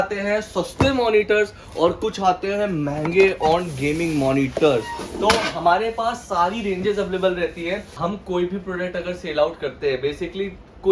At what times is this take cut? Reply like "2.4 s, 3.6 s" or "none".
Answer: 8.0 s